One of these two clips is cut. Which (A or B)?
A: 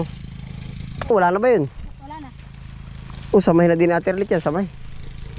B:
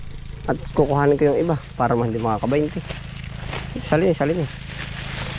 A